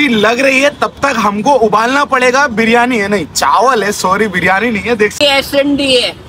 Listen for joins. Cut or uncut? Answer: cut